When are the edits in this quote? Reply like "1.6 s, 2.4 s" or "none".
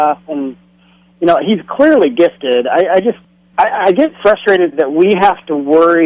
3.4 s